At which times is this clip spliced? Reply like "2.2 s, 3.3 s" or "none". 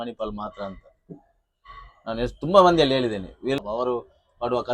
3.6 s

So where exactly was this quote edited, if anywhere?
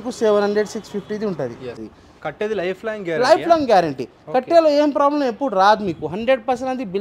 1.9 s

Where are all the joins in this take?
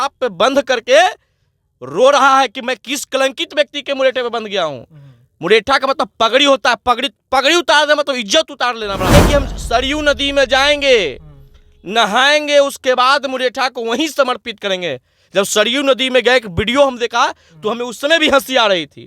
9.1 s

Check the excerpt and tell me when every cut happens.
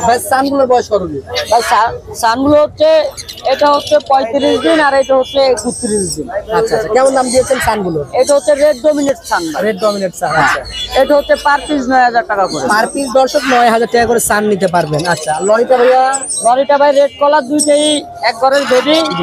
none

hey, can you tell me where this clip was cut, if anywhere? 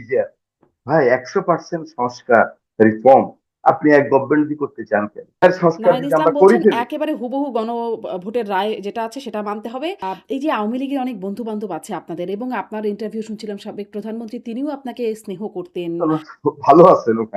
5.4 s, 10.0 s, 15.9 s

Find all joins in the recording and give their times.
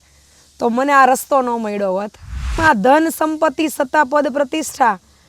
2.5 s

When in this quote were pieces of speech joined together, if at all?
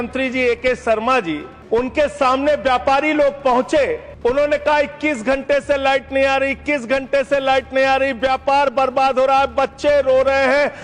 1.5 s, 4.1 s

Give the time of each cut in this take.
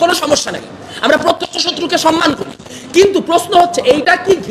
2.6 s

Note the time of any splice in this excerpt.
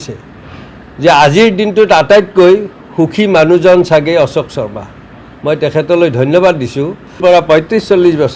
7.2 s

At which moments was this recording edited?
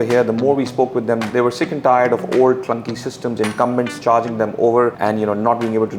5.0 s

